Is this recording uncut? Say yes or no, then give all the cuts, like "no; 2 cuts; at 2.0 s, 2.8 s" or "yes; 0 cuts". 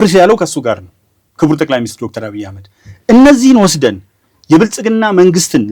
yes; 0 cuts